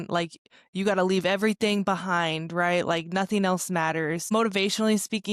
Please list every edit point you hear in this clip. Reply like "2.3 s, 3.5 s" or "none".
4.3 s